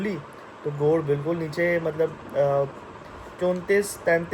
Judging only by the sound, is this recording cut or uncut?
uncut